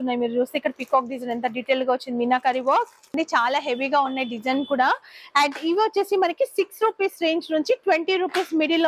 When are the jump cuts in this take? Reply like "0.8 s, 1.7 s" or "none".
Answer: 3.1 s